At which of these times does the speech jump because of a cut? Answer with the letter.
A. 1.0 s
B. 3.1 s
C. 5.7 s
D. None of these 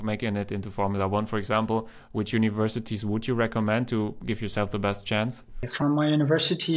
C